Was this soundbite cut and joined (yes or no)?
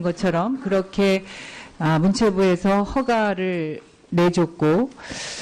no